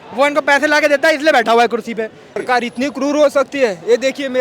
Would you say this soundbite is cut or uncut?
cut